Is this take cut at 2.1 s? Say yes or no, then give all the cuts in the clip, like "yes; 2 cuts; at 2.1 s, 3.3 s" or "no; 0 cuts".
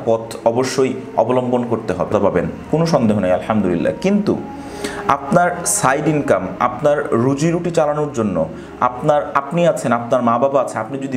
yes; 1 cut; at 2.1 s